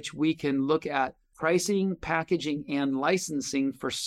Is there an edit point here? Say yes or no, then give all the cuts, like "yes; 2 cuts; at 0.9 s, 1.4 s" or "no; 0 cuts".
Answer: yes; 1 cut; at 1.3 s